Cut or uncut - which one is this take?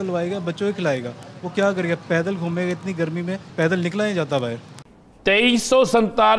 cut